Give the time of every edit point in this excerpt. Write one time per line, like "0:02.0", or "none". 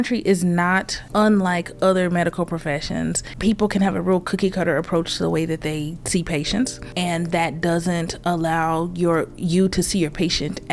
0:01.0
0:03.3
0:06.8